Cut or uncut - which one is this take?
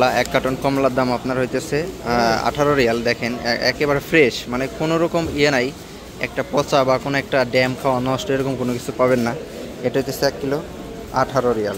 uncut